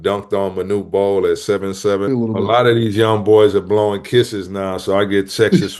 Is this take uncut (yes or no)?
no